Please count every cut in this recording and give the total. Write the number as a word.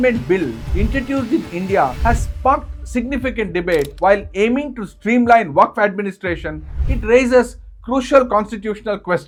zero